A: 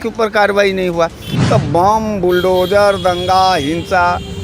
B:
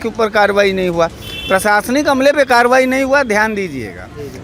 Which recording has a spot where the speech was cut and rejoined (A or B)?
A